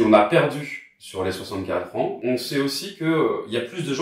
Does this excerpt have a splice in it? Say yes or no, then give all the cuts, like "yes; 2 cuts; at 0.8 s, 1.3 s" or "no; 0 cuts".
yes; 1 cut; at 2.2 s